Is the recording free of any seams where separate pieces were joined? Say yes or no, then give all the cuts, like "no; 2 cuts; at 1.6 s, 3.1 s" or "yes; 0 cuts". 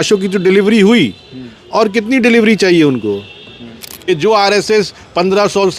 no; 1 cut; at 3.9 s